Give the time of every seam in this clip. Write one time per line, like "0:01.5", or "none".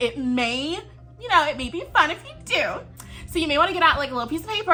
none